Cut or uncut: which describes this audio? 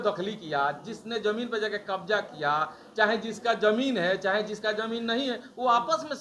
uncut